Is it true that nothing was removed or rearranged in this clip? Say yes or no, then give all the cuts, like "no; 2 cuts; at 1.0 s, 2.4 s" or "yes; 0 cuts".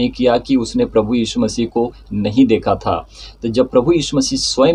yes; 0 cuts